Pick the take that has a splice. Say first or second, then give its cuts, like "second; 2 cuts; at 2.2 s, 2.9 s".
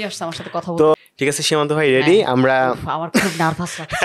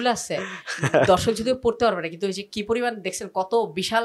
first; 1 cut; at 0.9 s